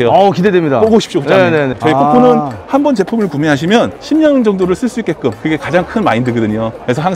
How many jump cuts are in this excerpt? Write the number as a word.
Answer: one